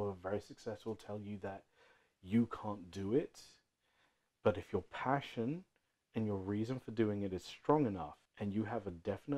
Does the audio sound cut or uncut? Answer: cut